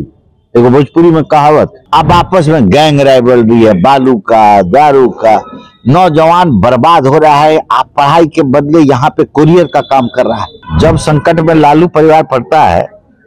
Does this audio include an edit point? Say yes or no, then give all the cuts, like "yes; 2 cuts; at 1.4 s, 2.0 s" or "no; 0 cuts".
yes; 2 cuts; at 1.8 s, 10.6 s